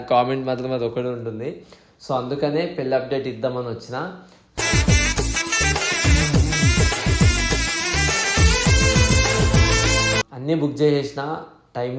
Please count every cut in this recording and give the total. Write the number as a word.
one